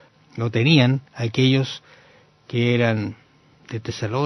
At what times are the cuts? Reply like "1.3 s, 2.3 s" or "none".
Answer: 3.2 s